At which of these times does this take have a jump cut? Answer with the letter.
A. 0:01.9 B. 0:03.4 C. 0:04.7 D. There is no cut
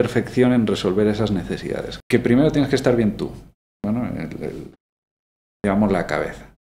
A